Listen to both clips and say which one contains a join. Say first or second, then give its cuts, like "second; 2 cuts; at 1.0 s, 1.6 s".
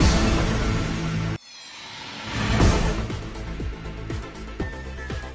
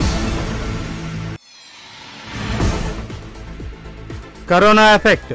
second; 1 cut; at 4.4 s